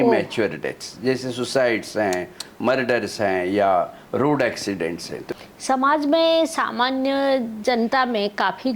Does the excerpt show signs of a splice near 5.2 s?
yes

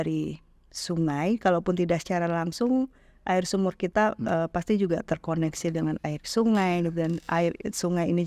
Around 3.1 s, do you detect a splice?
no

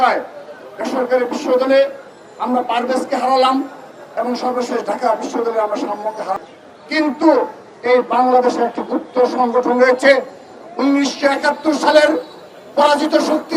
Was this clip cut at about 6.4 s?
yes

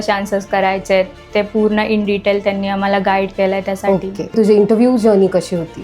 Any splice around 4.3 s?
yes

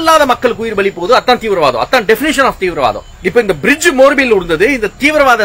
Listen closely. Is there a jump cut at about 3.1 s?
yes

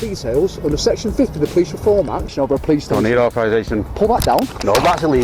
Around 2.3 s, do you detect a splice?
yes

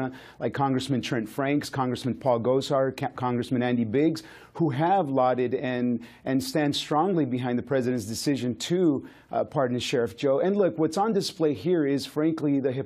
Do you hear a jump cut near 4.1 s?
yes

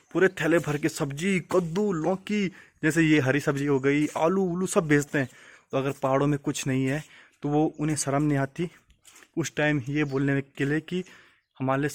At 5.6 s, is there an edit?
no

